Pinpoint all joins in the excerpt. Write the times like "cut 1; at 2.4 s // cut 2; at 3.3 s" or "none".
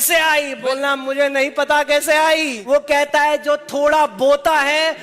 cut 1; at 2.6 s